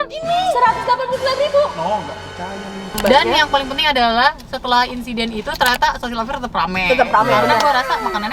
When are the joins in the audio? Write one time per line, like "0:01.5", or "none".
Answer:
0:03.0

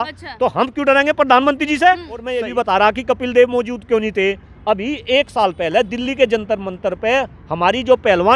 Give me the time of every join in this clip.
0:02.6

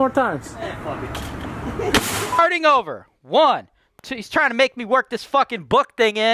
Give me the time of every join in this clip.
0:02.3

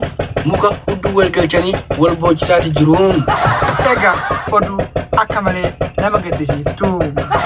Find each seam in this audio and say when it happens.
0:04.4

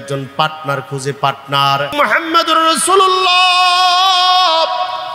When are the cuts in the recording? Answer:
0:01.9

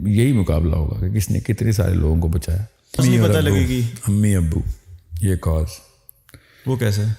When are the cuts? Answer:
0:03.0

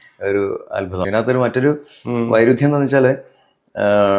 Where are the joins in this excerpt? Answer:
0:01.0

